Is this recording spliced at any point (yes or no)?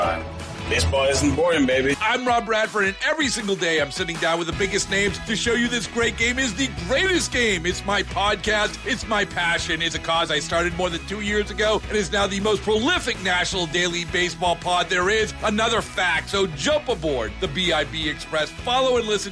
no